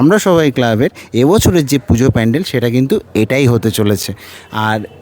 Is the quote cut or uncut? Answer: uncut